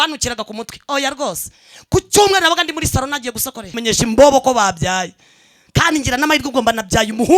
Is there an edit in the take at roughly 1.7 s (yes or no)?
no